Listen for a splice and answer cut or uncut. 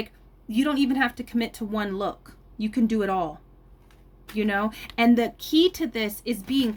uncut